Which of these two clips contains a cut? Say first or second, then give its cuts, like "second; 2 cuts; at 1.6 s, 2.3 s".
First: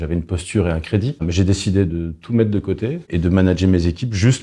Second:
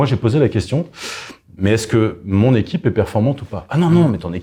first; 2 cuts; at 1.2 s, 3.0 s